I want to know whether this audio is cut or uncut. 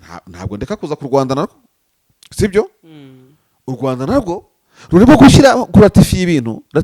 uncut